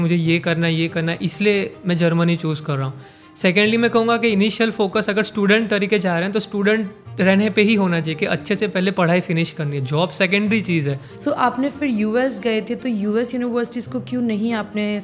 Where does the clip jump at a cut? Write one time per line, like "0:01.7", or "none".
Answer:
0:11.1

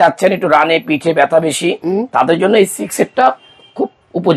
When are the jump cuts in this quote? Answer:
none

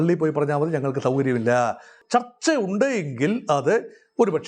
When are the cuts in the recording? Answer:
0:02.0

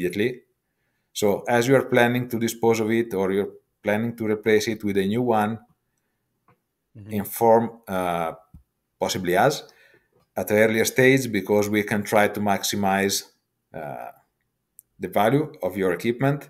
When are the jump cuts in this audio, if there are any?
none

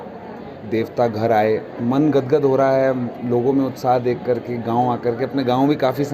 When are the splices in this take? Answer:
0:01.8

